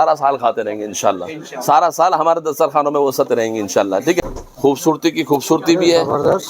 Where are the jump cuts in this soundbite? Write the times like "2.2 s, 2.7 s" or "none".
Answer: 4.2 s